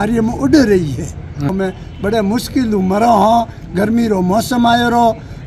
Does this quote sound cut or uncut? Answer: cut